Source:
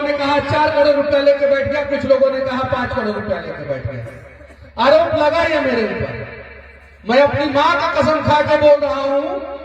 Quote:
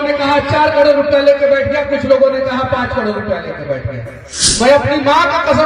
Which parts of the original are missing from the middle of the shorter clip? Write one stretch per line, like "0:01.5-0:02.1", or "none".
0:04.7-0:07.2